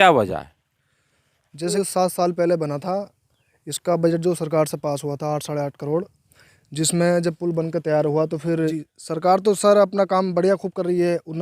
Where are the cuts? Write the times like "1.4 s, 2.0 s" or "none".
1.7 s, 8.8 s